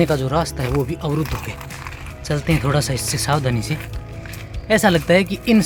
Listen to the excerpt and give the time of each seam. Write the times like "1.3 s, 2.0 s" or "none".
none